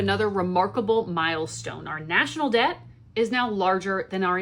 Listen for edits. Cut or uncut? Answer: uncut